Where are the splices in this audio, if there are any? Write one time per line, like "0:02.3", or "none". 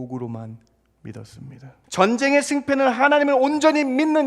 0:01.8